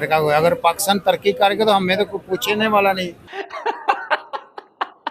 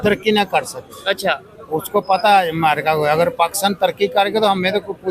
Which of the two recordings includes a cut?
first; 1 cut; at 3.5 s

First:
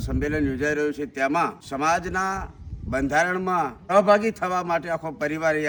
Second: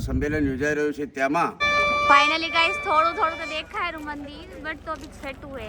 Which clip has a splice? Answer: second; 1 cut; at 1.6 s

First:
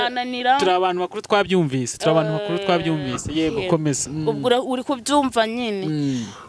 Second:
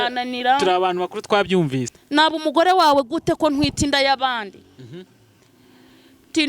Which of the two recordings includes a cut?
second; 1 cut; at 1.9 s

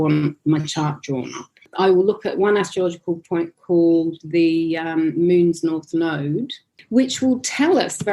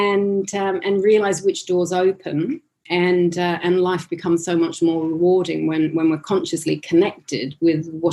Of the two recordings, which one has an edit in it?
first; 1 cut; at 1.7 s

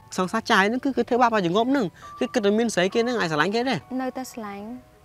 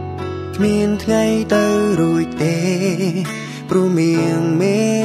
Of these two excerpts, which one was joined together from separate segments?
first; 1 cut; at 3.8 s

